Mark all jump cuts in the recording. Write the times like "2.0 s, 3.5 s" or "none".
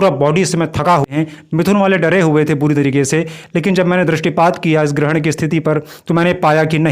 1.1 s